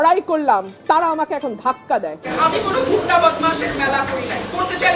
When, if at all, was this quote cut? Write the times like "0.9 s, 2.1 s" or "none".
2.3 s

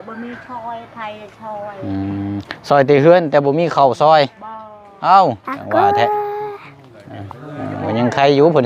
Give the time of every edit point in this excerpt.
none

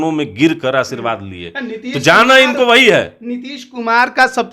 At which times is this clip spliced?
none

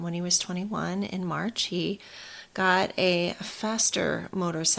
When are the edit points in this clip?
none

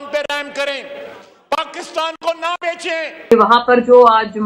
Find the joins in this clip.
3.3 s

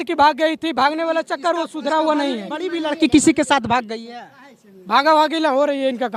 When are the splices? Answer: none

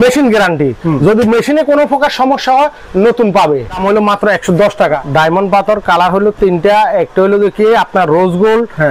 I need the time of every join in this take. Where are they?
3.8 s, 5.0 s

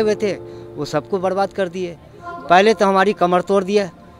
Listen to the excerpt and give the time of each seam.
none

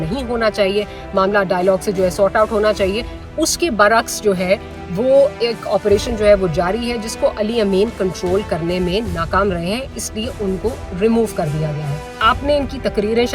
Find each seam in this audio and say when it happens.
12.2 s

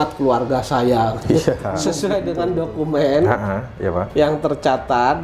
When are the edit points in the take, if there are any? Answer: 1.9 s

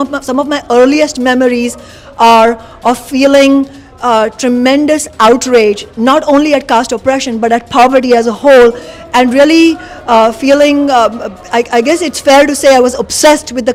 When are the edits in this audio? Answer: none

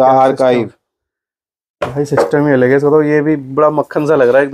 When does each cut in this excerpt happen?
none

